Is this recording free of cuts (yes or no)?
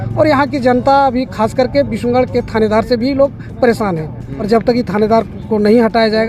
no